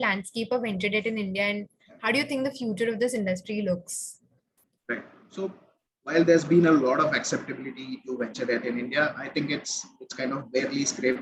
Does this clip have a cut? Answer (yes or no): no